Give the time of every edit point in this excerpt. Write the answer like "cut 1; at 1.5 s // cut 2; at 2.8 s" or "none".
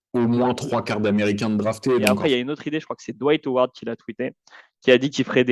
cut 1; at 2.2 s